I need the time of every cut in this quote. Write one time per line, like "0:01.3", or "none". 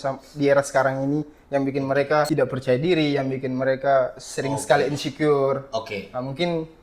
0:02.3